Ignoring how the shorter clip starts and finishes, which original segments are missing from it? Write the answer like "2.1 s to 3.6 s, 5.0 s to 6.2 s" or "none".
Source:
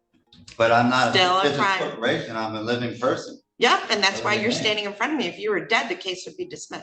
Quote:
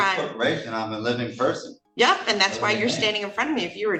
none